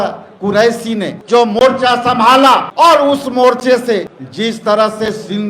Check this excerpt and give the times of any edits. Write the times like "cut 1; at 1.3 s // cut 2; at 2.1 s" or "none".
cut 1; at 1.2 s // cut 2; at 2.7 s // cut 3; at 4.2 s